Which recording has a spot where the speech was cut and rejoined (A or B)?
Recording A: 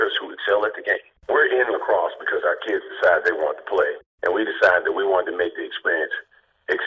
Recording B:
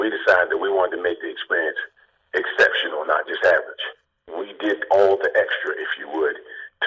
A